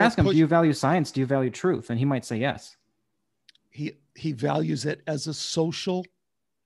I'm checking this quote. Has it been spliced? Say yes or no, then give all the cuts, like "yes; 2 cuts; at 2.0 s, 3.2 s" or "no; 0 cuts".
no; 0 cuts